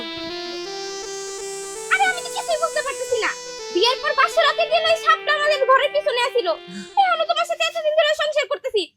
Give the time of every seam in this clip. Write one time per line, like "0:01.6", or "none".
none